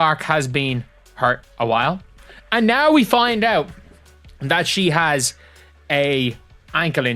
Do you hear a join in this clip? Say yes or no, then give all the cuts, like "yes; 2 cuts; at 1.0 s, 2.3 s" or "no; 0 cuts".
no; 0 cuts